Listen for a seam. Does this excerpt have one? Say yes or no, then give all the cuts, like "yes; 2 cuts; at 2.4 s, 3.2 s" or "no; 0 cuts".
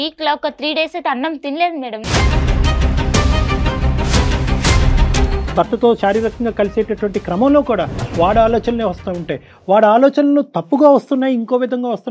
yes; 1 cut; at 5.4 s